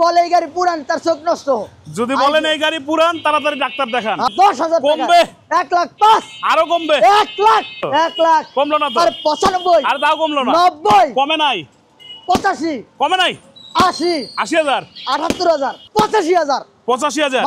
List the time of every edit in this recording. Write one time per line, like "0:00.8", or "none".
0:04.3
0:07.8
0:15.8